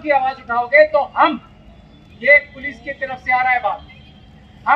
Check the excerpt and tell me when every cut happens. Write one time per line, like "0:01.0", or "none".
none